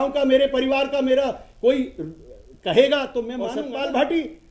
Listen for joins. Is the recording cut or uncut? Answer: cut